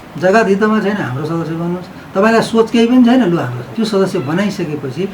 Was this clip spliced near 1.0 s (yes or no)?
no